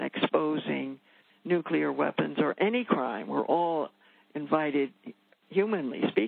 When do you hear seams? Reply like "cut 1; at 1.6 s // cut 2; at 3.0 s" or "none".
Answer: none